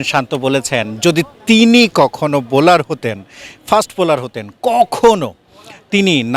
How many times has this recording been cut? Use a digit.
0